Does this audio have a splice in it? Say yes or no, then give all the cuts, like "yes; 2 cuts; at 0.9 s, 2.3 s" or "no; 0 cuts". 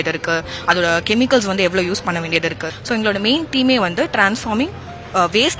yes; 1 cut; at 2.7 s